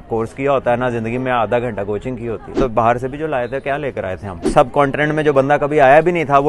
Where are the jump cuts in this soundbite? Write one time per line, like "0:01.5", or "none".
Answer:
0:02.5
0:04.4